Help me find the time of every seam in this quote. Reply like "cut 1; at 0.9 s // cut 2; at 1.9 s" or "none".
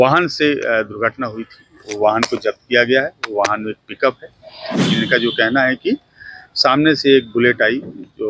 cut 1; at 4.7 s